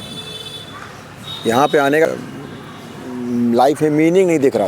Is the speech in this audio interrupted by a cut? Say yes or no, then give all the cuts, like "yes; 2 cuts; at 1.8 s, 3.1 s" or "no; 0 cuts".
yes; 1 cut; at 2.1 s